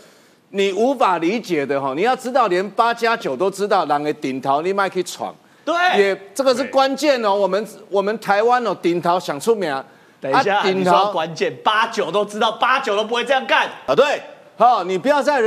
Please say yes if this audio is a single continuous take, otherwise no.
yes